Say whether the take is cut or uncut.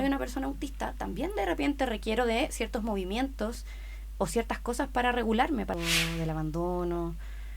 cut